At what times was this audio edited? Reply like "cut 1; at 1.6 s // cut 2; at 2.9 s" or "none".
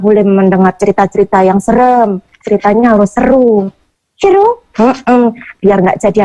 none